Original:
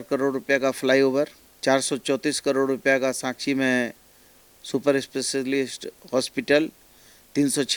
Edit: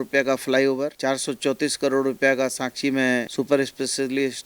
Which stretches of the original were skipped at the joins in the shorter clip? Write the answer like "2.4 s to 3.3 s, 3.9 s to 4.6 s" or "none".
1.3 s to 1.6 s, 3.9 s to 4.6 s